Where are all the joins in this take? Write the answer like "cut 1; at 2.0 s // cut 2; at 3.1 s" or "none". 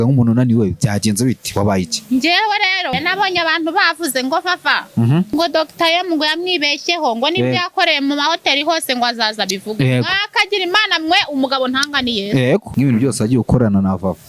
cut 1; at 2.9 s // cut 2; at 5.3 s // cut 3; at 12.7 s